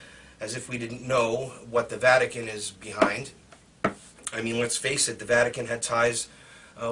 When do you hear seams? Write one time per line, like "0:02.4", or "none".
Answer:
0:01.6